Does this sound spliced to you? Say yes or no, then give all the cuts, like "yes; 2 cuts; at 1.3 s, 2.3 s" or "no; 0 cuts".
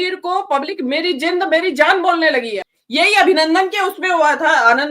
yes; 1 cut; at 2.6 s